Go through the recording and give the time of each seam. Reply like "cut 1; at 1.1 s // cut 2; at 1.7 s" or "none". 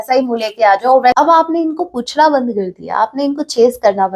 cut 1; at 1.1 s